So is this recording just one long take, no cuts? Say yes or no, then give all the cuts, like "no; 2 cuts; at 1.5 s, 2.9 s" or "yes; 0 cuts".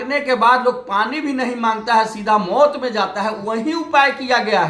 yes; 0 cuts